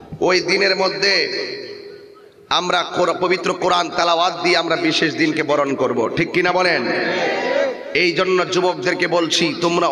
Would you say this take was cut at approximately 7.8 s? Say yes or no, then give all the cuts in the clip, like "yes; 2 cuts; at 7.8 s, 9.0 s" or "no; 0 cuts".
yes; 1 cut; at 7.8 s